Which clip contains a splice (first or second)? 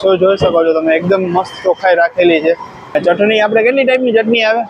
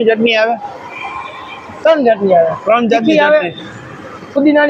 first